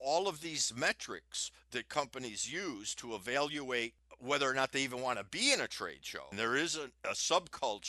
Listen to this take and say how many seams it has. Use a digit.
3